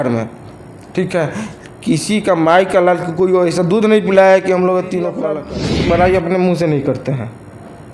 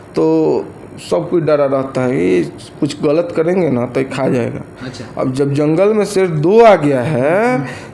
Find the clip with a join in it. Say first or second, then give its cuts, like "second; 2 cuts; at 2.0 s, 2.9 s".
first; 1 cut; at 5.3 s